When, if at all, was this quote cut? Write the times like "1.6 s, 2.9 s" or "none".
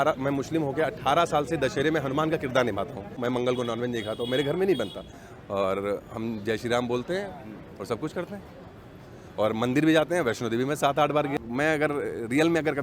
3.1 s, 5.1 s, 11.4 s